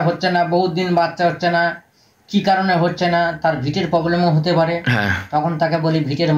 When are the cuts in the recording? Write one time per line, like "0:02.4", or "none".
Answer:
none

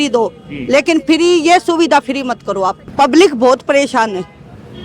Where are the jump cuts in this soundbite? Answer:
0:02.9

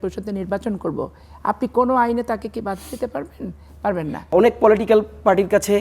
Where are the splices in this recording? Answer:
0:04.3

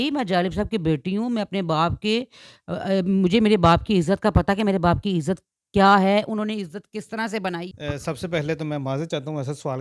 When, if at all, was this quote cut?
0:07.7

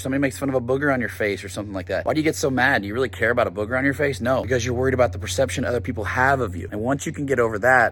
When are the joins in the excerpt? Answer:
none

